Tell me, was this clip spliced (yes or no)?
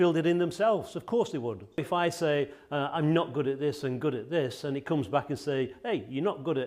yes